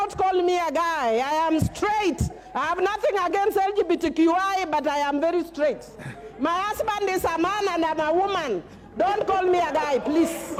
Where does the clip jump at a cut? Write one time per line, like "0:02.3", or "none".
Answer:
none